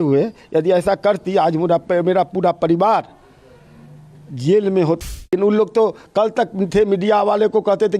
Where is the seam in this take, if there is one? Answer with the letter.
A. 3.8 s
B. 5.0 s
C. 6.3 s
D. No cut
B